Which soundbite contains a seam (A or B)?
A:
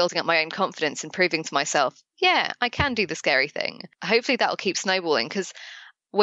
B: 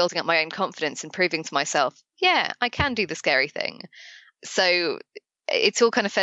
A